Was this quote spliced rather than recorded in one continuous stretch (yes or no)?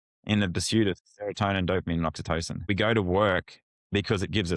yes